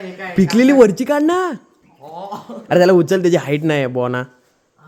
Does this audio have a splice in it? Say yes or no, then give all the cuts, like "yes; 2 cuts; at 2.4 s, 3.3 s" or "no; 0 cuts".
no; 0 cuts